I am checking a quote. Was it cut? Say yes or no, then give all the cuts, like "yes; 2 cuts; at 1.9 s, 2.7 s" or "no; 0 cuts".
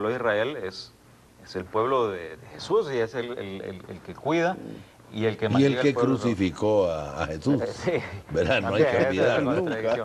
yes; 1 cut; at 1.2 s